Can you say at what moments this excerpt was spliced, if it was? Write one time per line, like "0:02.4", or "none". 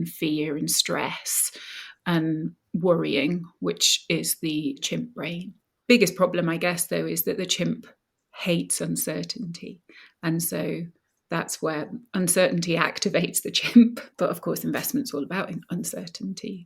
0:04.8
0:14.0